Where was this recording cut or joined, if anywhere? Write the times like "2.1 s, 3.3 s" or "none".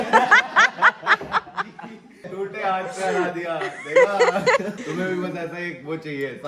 2.2 s, 4.8 s